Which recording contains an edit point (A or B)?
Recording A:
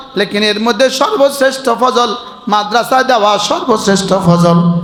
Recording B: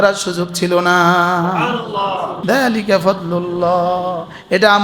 B